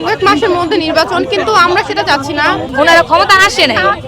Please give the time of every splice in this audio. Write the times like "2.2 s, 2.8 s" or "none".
2.7 s